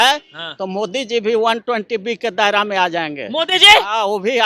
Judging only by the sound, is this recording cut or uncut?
uncut